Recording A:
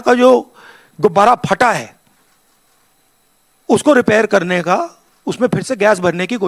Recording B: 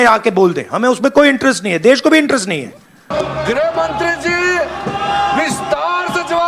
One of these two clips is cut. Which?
B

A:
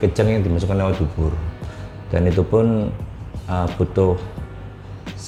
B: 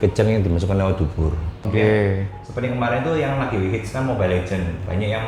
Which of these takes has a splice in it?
B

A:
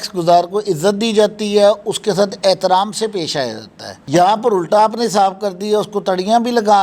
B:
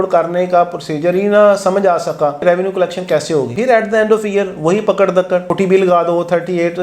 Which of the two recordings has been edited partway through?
B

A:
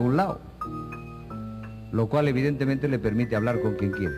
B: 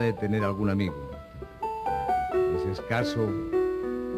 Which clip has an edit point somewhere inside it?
A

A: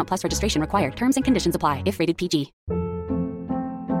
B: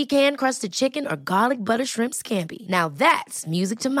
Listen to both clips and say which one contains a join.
A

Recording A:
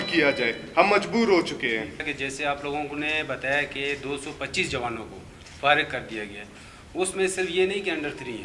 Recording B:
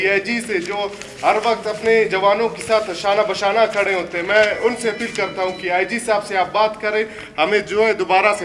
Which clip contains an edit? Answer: A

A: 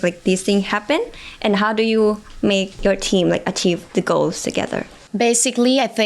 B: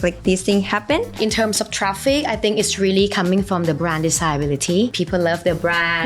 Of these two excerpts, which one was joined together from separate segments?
B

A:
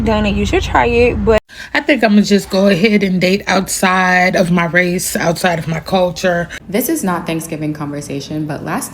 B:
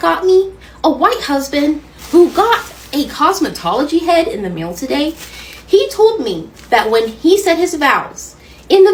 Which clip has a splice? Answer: A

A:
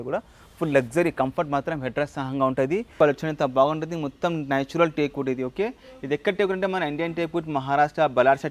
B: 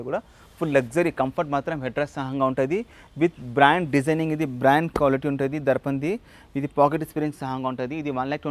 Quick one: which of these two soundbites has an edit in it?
A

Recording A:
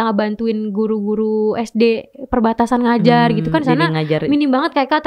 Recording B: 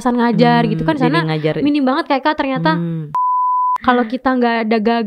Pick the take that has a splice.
B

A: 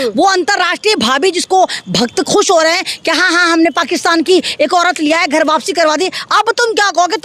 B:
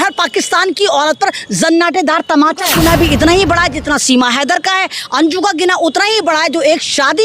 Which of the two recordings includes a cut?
B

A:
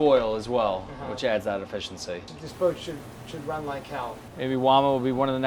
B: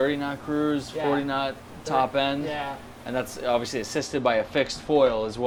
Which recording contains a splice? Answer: A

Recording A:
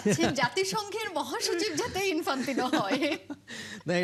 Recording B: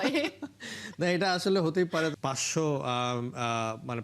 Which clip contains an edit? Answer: B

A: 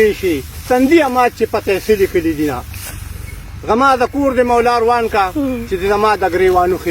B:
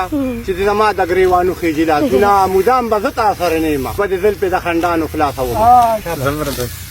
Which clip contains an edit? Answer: B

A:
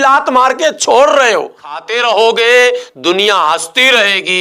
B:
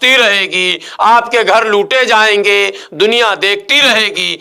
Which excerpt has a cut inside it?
A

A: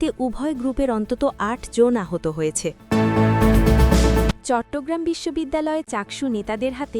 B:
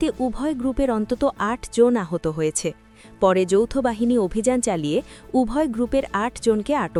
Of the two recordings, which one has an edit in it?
A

